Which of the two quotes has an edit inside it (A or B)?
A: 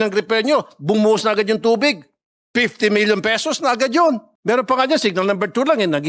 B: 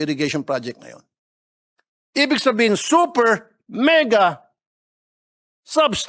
A